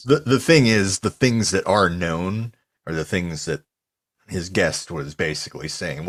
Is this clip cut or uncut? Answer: uncut